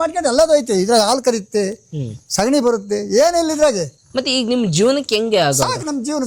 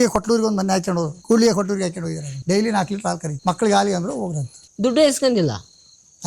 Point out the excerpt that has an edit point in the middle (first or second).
second